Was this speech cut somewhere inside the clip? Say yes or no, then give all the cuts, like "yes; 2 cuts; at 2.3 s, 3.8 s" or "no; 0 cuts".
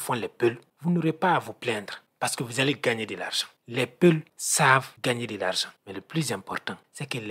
yes; 1 cut; at 4.7 s